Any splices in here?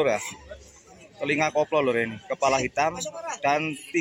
no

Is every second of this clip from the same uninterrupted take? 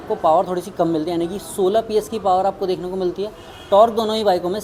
yes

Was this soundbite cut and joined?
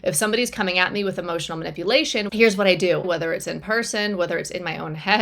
yes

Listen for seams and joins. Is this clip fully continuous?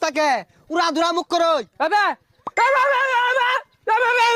yes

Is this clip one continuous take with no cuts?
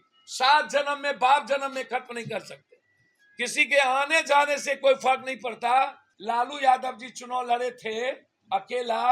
no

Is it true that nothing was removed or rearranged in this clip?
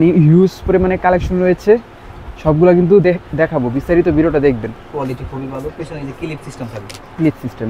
no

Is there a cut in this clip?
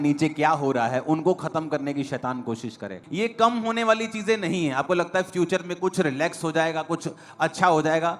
yes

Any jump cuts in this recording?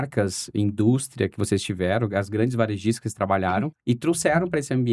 yes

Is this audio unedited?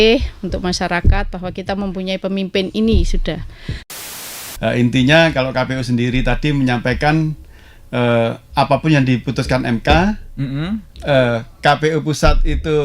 no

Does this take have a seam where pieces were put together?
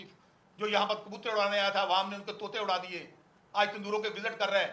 no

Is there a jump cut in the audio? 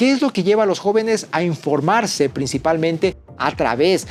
no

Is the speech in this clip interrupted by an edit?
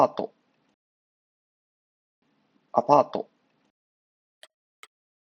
no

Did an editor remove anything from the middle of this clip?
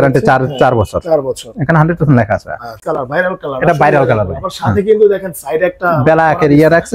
yes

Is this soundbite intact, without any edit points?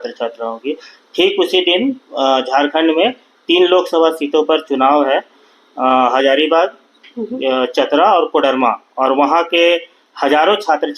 yes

